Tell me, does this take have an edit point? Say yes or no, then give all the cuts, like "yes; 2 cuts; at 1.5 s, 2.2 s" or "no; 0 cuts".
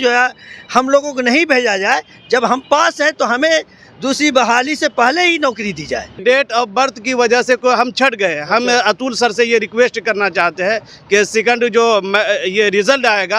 yes; 1 cut; at 6.2 s